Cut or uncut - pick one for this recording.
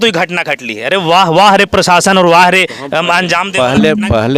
uncut